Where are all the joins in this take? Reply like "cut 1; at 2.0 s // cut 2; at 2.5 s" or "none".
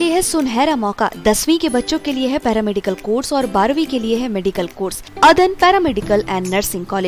cut 1; at 5.1 s